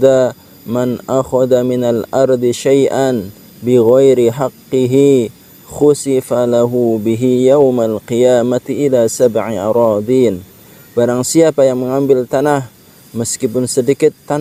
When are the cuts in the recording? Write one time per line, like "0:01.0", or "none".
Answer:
none